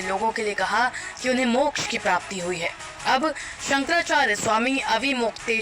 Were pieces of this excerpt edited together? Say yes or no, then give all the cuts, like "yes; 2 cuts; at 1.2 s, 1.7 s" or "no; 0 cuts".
no; 0 cuts